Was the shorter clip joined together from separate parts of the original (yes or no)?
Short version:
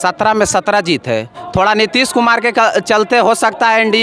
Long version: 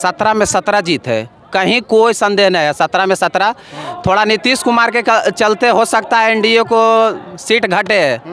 yes